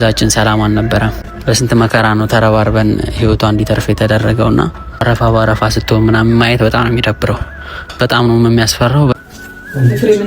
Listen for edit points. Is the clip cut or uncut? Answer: cut